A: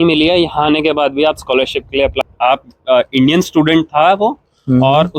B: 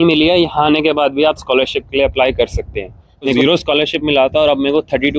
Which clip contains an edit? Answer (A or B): A